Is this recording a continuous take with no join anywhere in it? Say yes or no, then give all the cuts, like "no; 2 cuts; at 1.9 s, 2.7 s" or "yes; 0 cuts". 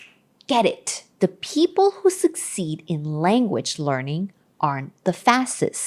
no; 1 cut; at 1.2 s